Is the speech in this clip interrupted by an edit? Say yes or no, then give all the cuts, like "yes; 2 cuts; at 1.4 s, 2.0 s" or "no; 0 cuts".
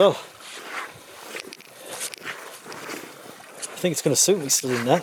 no; 0 cuts